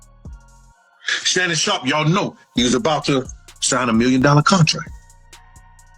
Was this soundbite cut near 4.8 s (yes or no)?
yes